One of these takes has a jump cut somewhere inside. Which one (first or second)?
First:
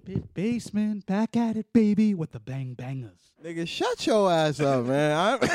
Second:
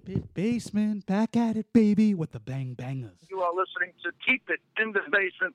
second